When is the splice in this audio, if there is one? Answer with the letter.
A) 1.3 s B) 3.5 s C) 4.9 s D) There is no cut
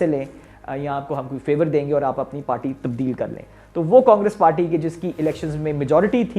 D